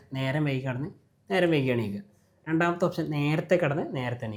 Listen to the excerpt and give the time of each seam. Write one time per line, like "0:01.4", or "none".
none